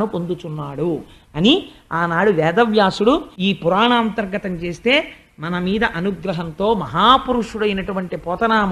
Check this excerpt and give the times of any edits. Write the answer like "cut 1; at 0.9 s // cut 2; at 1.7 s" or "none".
cut 1; at 3.3 s